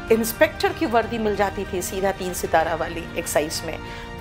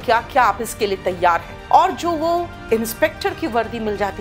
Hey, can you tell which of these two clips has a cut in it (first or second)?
second